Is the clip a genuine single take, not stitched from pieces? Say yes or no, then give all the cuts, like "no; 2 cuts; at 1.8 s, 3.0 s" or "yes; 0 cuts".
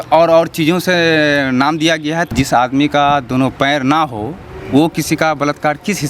no; 1 cut; at 2.3 s